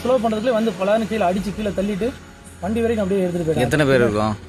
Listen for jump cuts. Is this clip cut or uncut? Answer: uncut